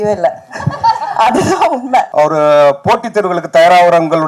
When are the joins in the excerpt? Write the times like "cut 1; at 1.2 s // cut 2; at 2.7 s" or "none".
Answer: cut 1; at 2.1 s